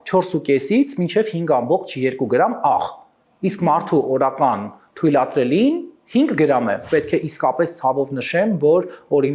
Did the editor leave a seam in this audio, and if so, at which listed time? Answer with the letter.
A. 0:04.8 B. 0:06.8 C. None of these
B